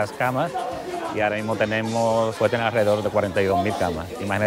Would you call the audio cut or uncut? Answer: cut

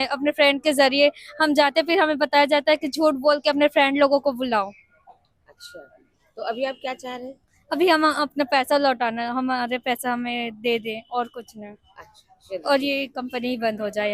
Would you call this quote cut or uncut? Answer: uncut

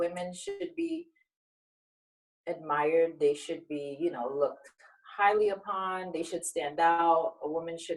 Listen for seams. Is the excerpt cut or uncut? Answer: uncut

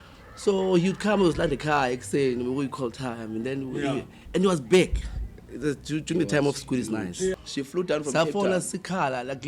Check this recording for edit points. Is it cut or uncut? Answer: cut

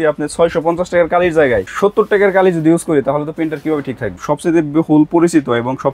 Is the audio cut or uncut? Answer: cut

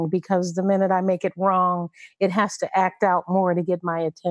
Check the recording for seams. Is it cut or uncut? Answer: uncut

